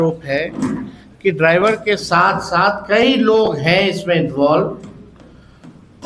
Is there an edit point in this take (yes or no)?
no